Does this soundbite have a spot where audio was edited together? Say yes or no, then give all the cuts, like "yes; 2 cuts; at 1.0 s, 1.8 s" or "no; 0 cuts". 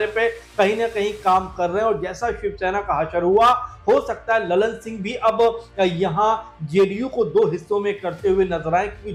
no; 0 cuts